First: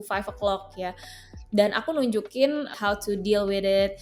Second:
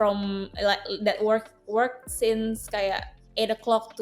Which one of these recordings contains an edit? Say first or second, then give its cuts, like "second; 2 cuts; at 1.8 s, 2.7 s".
first; 1 cut; at 2.7 s